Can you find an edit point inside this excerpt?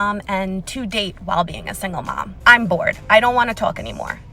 yes; 1 cut; at 2.4 s

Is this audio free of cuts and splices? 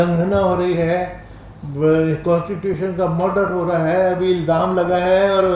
yes; 0 cuts

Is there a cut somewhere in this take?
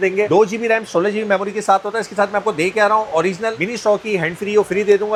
no; 0 cuts

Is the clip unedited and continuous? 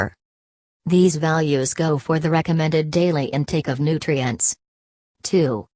yes; 0 cuts

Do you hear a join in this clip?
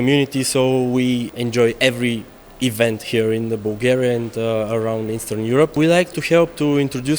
yes; 2 cuts; at 1.3 s, 5.7 s

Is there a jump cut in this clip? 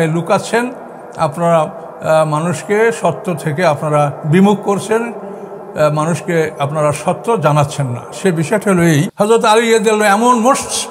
yes; 1 cut; at 9.1 s

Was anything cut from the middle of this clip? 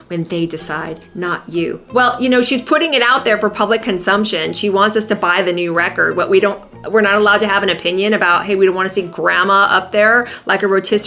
no; 0 cuts

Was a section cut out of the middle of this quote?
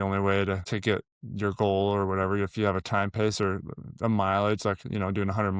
yes; 1 cut; at 1.0 s

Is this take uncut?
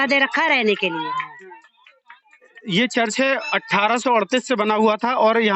no; 1 cut; at 2.6 s

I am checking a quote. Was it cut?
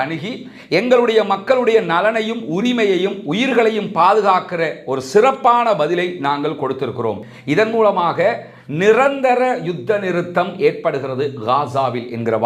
yes; 1 cut; at 7.2 s

